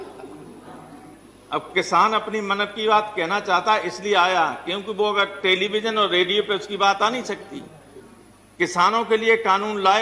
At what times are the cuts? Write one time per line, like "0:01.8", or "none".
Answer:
0:07.9